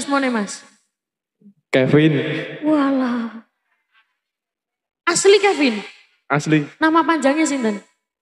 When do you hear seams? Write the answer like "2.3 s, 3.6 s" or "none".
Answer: none